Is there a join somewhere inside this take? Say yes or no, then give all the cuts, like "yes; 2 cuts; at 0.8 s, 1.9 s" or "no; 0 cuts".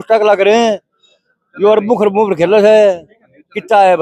no; 0 cuts